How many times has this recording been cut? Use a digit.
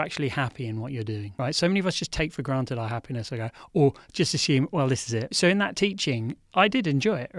2